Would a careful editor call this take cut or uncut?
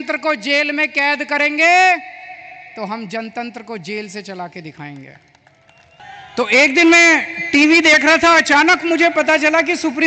cut